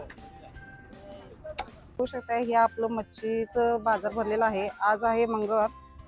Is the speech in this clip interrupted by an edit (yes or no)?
yes